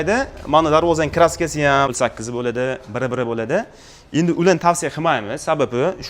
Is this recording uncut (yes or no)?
no